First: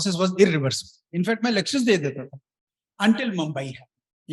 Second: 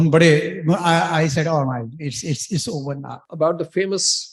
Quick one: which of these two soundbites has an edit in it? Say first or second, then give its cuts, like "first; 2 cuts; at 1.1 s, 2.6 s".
second; 1 cut; at 3.2 s